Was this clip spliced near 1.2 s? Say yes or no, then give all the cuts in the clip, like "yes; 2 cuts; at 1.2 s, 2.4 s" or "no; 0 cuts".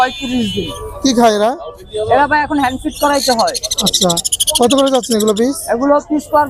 no; 0 cuts